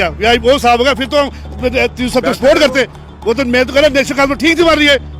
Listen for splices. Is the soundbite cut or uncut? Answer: uncut